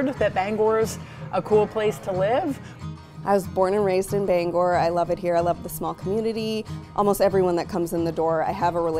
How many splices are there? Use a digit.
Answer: 2